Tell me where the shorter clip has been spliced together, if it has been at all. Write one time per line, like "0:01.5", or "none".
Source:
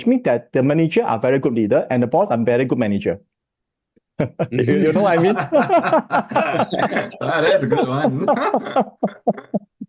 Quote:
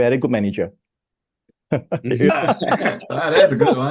0:02.3